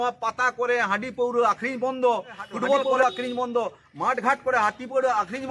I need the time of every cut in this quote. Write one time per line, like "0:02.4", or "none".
0:02.9